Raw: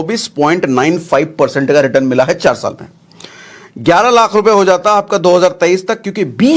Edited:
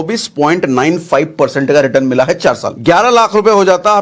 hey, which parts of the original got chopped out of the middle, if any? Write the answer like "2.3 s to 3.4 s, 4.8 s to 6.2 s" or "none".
2.7 s to 3.7 s